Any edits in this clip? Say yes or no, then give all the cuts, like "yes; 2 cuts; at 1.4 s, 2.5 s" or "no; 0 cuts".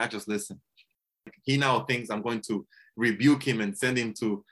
yes; 1 cut; at 1.3 s